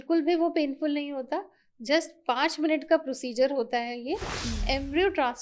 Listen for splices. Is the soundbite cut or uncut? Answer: cut